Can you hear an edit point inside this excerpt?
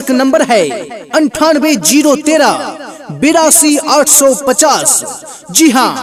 no; 0 cuts

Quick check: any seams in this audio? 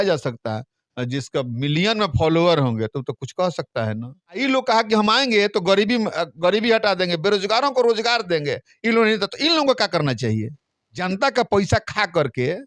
yes; 2 cuts; at 4.4 s, 11.0 s

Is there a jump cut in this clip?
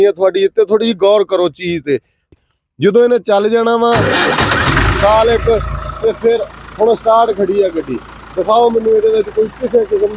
yes; 1 cut; at 2.3 s

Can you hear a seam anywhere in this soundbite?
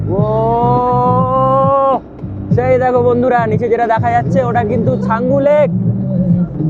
no; 0 cuts

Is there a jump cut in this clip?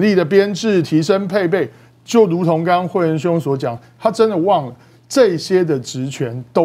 no; 0 cuts

